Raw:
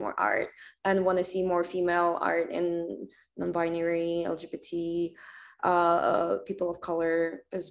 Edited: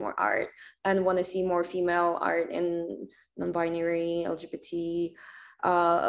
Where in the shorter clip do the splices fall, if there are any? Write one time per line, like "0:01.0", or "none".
none